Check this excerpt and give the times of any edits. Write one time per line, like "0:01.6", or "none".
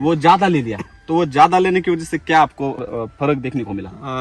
0:02.8